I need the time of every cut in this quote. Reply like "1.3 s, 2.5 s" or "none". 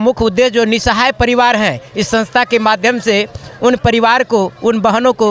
none